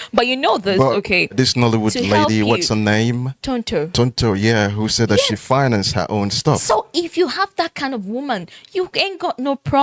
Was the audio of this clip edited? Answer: yes; 2 cuts; at 1.3 s, 3.3 s

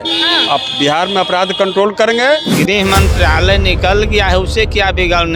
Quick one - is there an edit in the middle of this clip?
yes; 1 cut; at 2.5 s

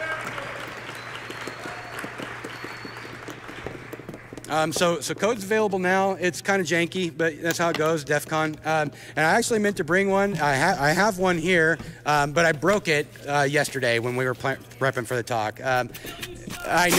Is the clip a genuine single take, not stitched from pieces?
yes; 0 cuts

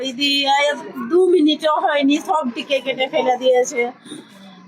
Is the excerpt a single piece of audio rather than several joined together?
yes; 0 cuts

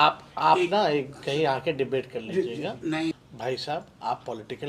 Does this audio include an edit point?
yes; 1 cut; at 3.1 s

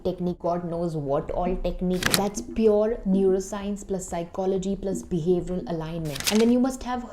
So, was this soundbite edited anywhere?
yes; 2 cuts; at 2.1 s, 6.2 s

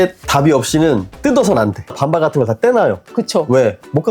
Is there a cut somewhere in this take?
yes; 1 cut; at 2.0 s

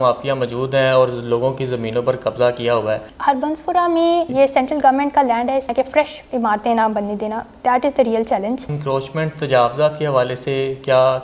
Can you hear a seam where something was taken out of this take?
yes; 4 cuts; at 3.1 s, 4.3 s, 5.7 s, 8.7 s

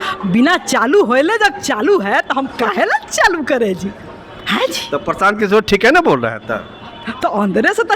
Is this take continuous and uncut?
yes; 0 cuts

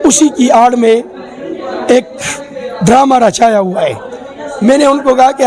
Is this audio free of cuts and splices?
yes; 0 cuts

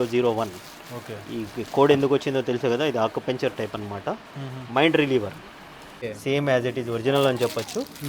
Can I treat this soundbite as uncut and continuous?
no; 1 cut; at 6.0 s

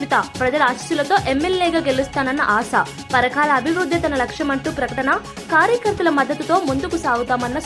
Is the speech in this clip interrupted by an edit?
no; 0 cuts

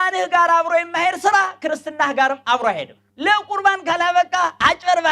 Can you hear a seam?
yes; 1 cut; at 3.1 s

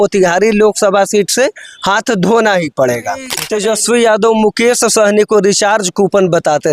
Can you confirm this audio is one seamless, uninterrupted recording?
no; 1 cut; at 3.4 s

